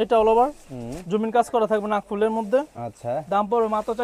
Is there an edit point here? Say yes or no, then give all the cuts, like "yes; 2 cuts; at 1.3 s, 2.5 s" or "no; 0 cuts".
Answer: no; 0 cuts